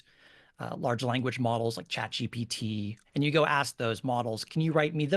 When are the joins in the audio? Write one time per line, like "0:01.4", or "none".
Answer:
0:03.0